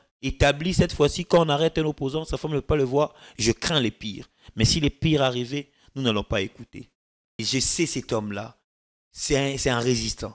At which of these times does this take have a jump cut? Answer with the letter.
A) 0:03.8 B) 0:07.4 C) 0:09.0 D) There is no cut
B